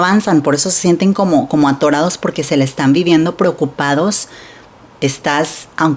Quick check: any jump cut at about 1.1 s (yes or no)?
no